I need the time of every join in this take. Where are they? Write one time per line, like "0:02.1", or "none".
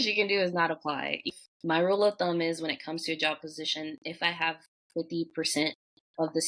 0:01.2